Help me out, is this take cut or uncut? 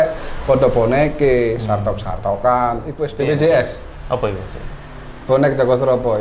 cut